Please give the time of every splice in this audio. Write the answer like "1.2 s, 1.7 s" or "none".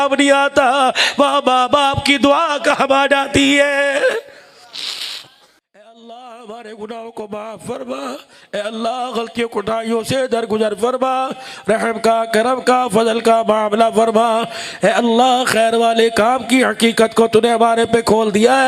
5.9 s